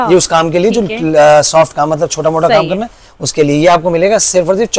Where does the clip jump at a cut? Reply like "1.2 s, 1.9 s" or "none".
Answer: none